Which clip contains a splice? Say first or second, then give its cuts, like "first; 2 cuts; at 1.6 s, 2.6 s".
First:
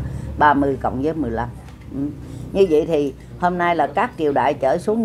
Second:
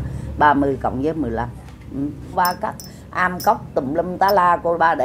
second; 1 cut; at 2.3 s